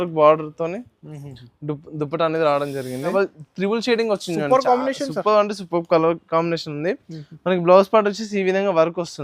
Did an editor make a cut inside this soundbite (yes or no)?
yes